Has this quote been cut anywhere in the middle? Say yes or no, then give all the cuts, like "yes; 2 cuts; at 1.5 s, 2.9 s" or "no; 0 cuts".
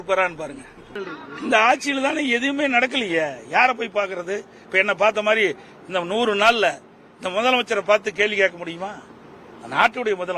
yes; 1 cut; at 1.0 s